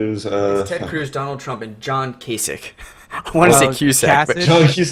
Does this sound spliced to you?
no; 0 cuts

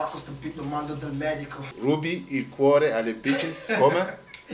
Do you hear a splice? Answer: yes; 1 cut; at 1.7 s

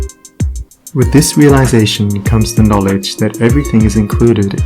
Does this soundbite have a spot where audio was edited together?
no; 0 cuts

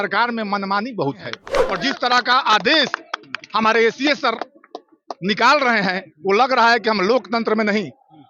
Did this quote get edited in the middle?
yes; 1 cut; at 1.5 s

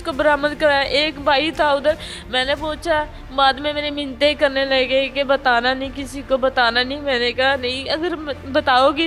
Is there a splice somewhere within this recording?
no; 0 cuts

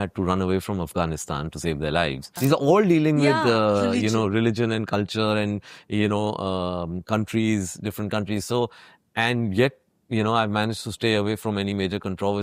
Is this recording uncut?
no; 1 cut; at 2.3 s

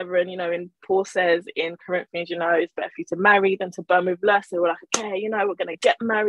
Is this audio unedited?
yes; 0 cuts

